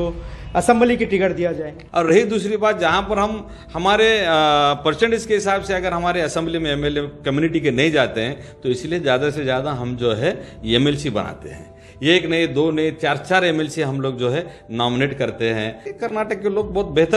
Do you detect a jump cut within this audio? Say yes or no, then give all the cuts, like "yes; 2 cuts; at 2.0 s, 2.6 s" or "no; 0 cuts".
yes; 2 cuts; at 1.8 s, 15.9 s